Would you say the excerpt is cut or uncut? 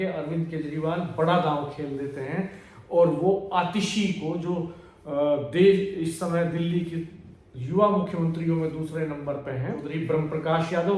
cut